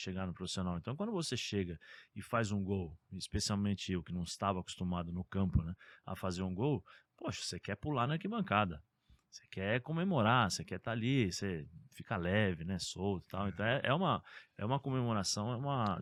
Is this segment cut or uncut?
uncut